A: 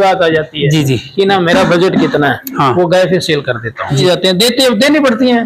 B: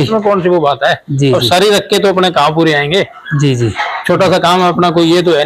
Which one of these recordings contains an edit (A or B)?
A